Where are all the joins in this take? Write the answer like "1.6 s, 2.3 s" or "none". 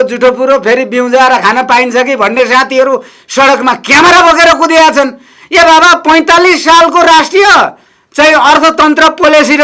none